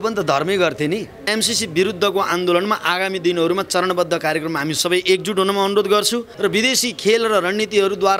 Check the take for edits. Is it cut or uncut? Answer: cut